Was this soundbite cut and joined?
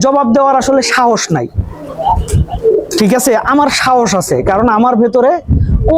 no; 0 cuts

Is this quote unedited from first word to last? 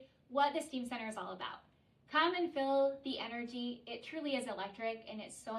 yes; 0 cuts

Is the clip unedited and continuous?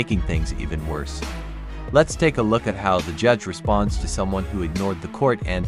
yes; 0 cuts

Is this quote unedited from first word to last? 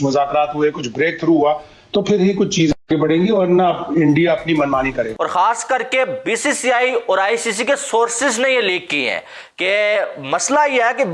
no; 1 cut; at 5.1 s

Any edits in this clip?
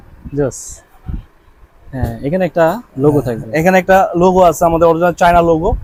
no; 0 cuts

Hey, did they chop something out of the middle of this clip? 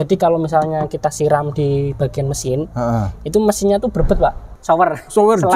yes; 1 cut; at 4.5 s

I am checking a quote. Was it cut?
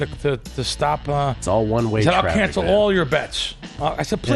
no; 0 cuts

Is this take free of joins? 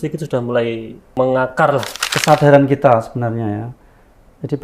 no; 2 cuts; at 1.1 s, 2.0 s

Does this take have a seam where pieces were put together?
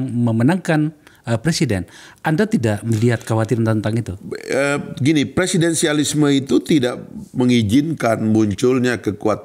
no; 0 cuts

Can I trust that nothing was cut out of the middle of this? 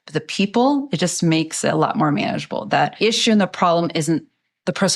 no; 1 cut; at 3.0 s

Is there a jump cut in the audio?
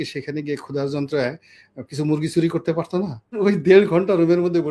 yes; 1 cut; at 3.4 s

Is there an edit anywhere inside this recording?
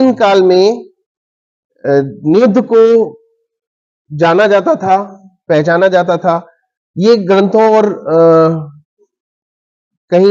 no; 0 cuts

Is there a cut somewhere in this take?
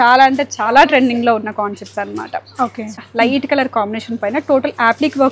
yes; 1 cut; at 2.9 s

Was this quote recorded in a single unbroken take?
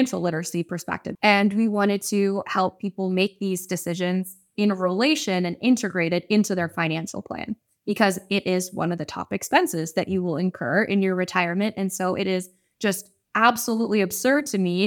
no; 1 cut; at 1.0 s

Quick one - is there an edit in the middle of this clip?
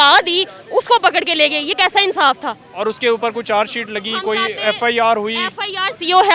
no; 0 cuts

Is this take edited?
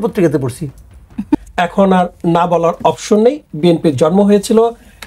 yes; 1 cut; at 1.4 s

